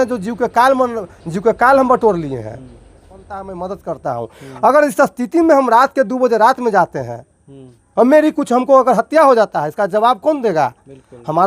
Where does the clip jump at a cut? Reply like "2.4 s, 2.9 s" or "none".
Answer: 3.4 s